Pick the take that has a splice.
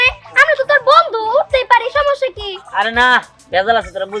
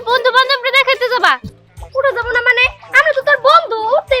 second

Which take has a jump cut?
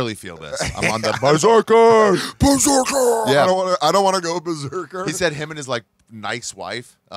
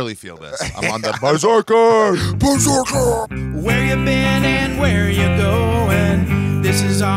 second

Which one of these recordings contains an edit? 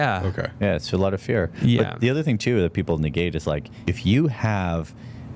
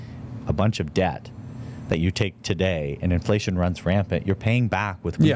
first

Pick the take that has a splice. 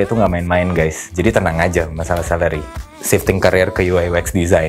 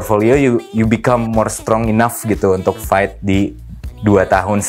first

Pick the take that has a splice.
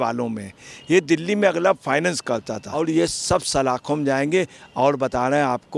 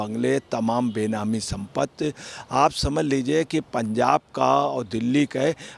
first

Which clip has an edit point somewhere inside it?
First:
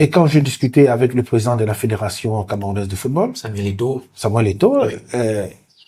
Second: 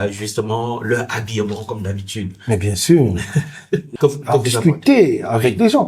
second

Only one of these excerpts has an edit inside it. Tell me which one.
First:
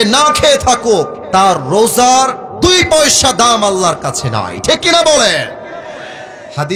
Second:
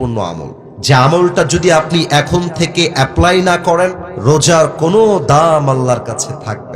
second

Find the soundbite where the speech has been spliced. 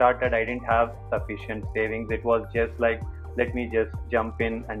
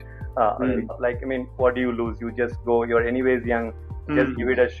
second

